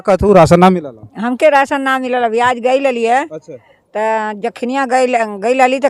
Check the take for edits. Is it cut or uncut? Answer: uncut